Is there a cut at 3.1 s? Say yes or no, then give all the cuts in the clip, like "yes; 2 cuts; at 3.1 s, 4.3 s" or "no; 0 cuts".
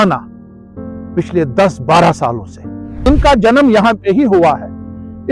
yes; 1 cut; at 3.1 s